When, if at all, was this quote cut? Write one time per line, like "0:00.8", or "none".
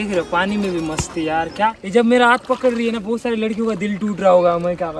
0:01.8